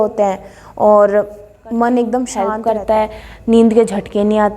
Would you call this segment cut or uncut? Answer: cut